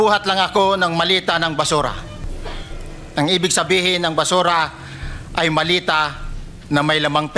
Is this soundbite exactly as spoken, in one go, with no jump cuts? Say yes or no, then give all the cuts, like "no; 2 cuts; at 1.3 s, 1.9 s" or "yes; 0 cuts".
yes; 0 cuts